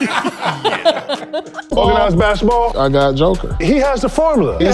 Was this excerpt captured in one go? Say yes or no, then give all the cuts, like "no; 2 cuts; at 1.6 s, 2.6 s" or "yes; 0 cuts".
no; 1 cut; at 1.6 s